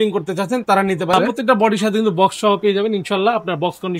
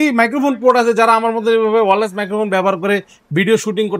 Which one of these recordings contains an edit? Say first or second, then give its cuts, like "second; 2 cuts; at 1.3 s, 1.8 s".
first; 1 cut; at 1.2 s